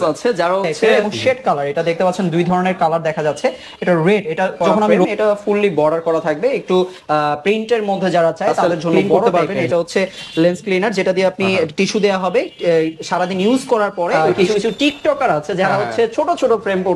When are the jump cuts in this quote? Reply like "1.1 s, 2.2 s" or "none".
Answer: 0.9 s, 4.8 s, 9.1 s, 14.3 s